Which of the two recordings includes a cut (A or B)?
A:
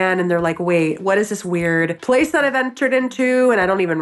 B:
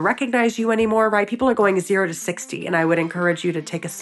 A